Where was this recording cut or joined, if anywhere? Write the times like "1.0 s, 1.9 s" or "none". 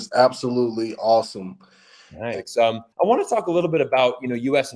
2.3 s

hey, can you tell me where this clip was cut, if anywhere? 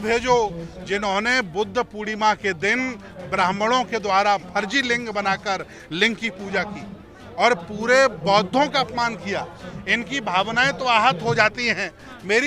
none

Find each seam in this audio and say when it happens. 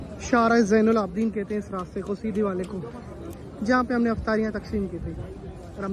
none

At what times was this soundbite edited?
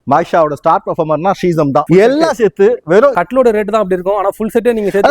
1.9 s, 3.1 s

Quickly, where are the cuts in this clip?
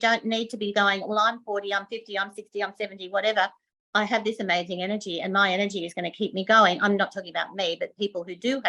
none

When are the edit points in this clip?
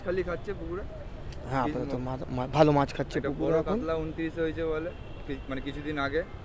none

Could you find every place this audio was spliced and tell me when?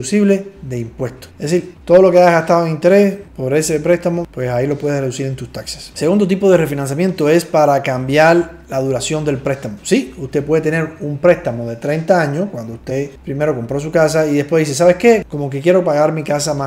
none

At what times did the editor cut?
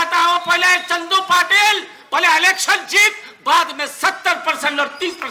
none

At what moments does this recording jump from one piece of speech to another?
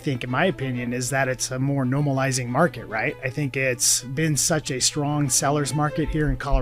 none

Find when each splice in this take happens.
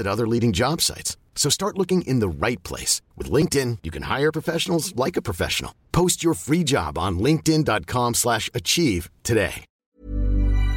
9.7 s

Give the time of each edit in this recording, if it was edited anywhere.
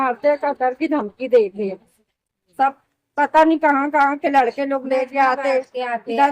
none

